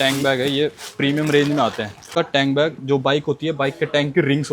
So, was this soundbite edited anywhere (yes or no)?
yes